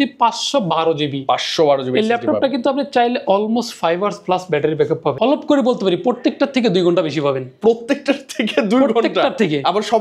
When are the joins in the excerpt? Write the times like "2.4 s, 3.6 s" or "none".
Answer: 5.2 s